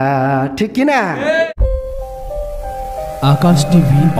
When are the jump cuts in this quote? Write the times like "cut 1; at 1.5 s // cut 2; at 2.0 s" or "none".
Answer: cut 1; at 1.5 s